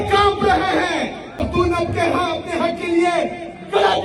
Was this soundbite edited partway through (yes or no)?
yes